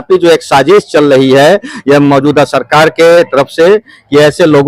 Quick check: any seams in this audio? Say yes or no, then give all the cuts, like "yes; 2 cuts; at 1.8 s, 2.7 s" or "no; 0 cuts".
no; 0 cuts